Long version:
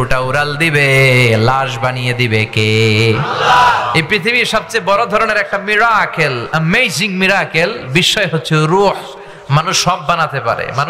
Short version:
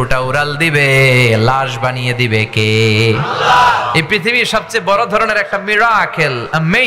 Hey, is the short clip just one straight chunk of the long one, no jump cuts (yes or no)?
yes